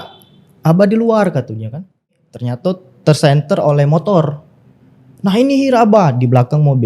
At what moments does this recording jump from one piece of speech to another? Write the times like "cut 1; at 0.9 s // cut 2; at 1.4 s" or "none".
cut 1; at 2.2 s